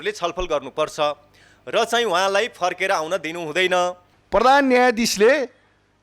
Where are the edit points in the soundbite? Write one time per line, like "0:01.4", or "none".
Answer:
0:04.1